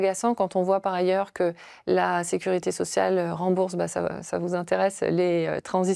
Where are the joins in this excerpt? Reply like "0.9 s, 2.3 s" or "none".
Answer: none